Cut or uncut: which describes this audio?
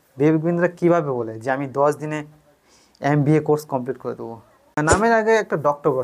cut